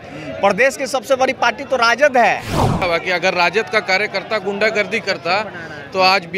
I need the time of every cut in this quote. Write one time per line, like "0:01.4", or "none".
0:02.8